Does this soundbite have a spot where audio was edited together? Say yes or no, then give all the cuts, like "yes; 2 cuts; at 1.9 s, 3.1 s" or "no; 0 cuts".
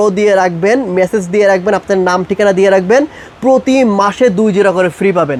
no; 0 cuts